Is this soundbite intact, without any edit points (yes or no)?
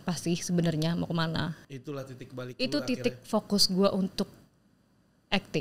no